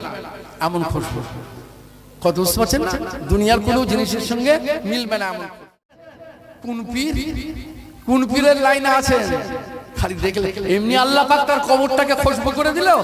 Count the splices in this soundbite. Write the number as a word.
one